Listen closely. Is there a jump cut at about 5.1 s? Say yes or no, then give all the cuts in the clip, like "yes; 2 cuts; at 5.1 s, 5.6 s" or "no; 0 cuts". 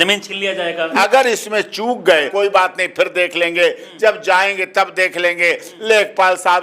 no; 2 cuts; at 0.9 s, 2.3 s